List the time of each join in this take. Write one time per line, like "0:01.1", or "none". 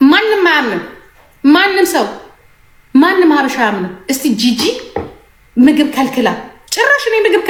none